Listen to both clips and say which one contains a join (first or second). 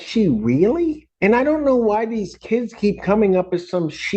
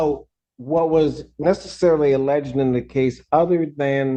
first